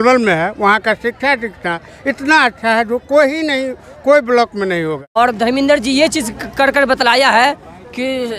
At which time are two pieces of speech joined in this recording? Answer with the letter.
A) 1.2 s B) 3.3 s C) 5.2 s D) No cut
C